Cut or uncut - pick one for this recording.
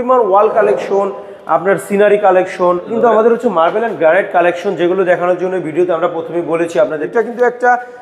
cut